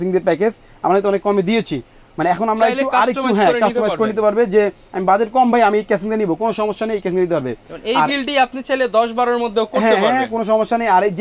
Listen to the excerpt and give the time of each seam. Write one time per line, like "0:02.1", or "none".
none